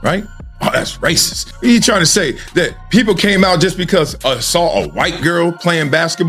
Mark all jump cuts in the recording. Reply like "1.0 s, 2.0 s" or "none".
1.4 s